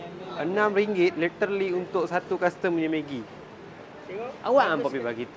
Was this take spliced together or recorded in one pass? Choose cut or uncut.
uncut